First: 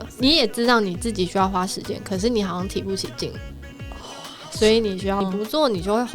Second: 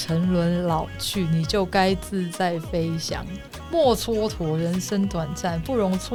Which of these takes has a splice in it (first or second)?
first